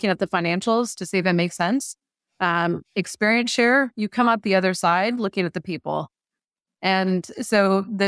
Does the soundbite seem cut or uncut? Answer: uncut